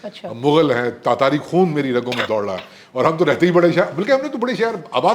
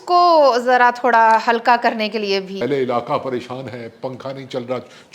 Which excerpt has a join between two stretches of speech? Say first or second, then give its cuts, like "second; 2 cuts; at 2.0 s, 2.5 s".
second; 1 cut; at 2.6 s